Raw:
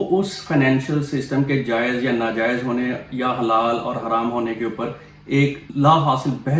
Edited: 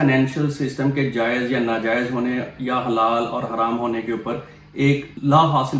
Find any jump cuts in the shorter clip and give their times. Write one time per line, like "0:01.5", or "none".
none